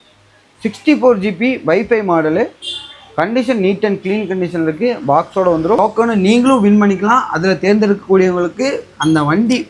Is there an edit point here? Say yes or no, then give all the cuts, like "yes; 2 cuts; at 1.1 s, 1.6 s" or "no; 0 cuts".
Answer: yes; 1 cut; at 5.8 s